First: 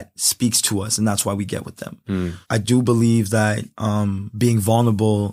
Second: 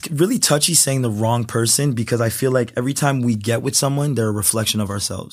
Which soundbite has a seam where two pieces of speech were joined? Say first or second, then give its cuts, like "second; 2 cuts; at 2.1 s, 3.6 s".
first; 2 cuts; at 2.4 s, 4.2 s